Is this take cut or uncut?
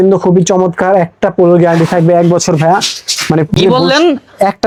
uncut